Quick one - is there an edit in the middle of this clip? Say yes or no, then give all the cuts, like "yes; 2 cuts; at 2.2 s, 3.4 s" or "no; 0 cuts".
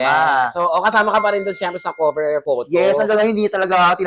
no; 0 cuts